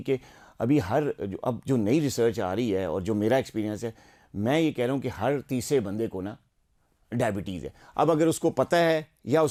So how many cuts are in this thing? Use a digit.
0